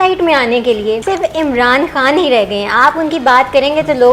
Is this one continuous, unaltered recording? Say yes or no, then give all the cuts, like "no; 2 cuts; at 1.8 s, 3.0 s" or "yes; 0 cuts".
no; 1 cut; at 1.0 s